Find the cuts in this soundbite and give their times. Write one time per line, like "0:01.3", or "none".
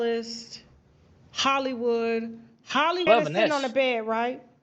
0:03.1